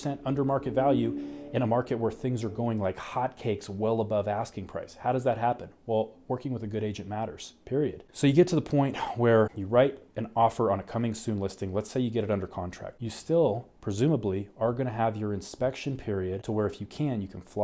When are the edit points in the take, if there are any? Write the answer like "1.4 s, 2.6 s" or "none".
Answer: none